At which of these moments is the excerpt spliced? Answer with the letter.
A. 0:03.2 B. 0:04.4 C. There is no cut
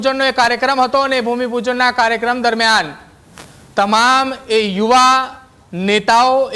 C